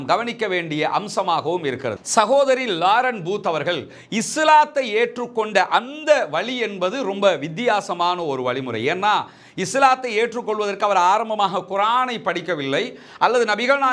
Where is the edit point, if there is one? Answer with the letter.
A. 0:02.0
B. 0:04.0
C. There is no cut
A